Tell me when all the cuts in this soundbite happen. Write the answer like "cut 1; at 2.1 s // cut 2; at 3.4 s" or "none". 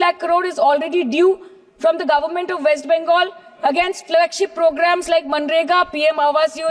none